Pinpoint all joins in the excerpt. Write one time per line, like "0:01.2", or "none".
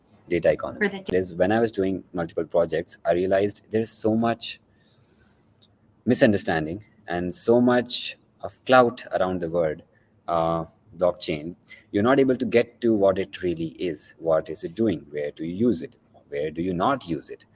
0:01.1